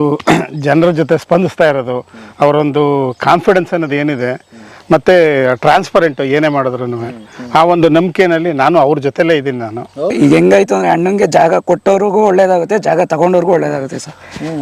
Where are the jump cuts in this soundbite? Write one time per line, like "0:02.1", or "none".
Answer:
0:10.0